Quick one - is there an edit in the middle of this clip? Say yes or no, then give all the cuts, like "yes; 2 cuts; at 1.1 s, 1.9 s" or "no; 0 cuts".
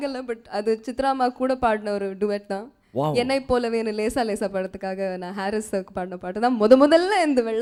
no; 0 cuts